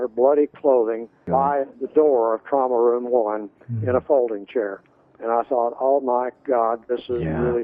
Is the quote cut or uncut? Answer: uncut